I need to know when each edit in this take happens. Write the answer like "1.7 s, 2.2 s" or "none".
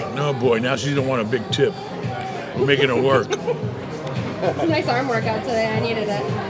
none